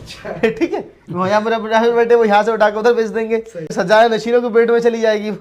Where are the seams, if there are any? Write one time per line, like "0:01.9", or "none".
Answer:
0:03.7